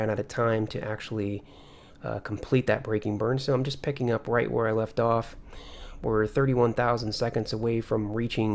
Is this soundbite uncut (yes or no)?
no